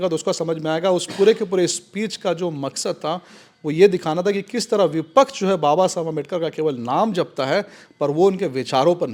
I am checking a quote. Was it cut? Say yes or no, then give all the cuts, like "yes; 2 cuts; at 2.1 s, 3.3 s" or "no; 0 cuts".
no; 0 cuts